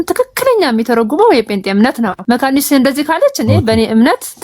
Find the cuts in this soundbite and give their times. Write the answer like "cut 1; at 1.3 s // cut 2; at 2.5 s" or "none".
cut 1; at 2.2 s